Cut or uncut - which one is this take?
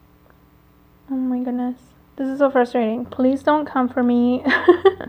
cut